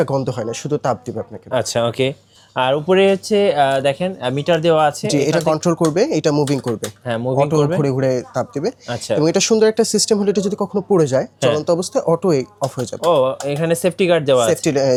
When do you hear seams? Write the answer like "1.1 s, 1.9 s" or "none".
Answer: none